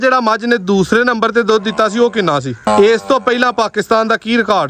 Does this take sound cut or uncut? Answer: cut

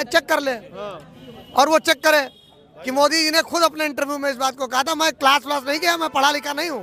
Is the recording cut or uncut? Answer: uncut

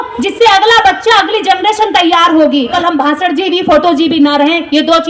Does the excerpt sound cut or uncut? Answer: cut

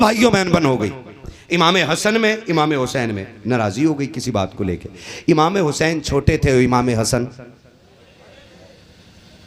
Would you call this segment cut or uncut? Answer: uncut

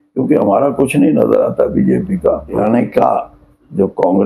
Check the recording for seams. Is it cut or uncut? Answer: cut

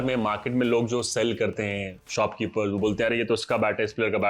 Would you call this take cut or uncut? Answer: uncut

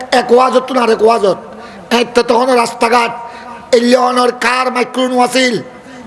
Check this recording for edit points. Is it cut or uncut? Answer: uncut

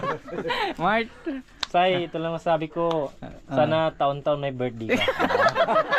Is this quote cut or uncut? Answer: uncut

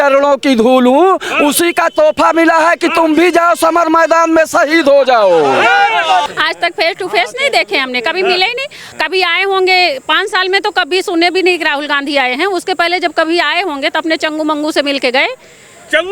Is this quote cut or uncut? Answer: cut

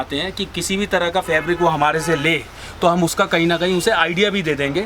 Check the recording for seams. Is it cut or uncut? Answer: uncut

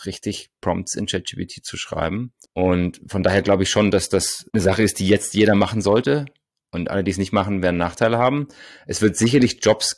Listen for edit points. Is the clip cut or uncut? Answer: uncut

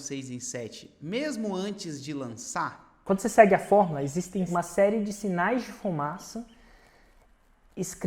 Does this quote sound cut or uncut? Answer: cut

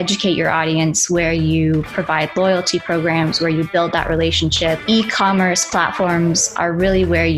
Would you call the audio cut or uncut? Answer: uncut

